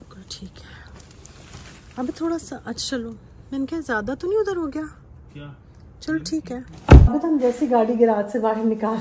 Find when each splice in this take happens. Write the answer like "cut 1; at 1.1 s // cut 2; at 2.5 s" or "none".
cut 1; at 7.1 s